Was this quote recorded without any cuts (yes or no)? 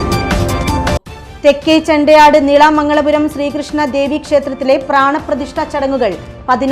no